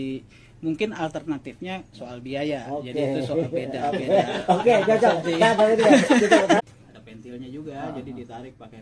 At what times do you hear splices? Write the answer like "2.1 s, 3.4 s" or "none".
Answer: 6.6 s